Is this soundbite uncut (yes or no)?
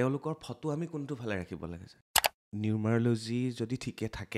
no